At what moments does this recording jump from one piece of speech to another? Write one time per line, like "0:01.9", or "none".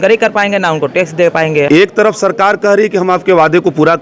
0:01.7